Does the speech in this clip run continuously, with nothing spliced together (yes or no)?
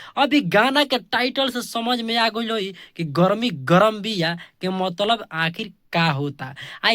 no